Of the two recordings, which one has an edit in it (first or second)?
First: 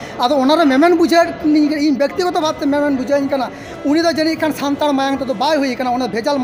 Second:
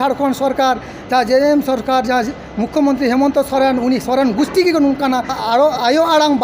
second